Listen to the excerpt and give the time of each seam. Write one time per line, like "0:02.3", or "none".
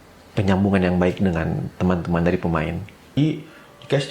0:03.1